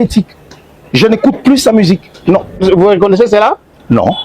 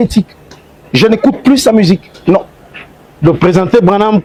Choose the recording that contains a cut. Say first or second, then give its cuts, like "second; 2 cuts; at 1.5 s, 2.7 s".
first; 1 cut; at 2.6 s